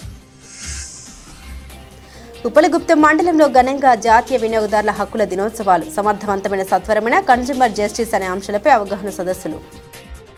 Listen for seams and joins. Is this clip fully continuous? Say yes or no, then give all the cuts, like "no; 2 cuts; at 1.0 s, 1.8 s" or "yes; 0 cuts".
yes; 0 cuts